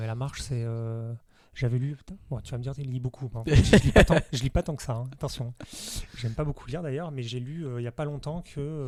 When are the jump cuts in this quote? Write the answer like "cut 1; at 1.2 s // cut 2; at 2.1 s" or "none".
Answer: none